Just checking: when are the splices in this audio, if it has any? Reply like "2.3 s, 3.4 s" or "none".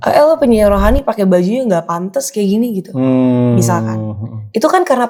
none